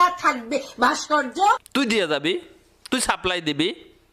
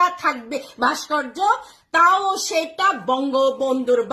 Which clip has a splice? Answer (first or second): second